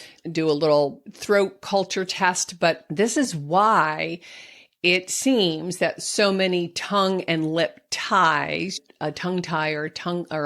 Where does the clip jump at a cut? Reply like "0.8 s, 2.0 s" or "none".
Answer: 1.1 s, 2.8 s, 8.8 s